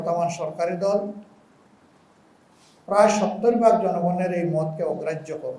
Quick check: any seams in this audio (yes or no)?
no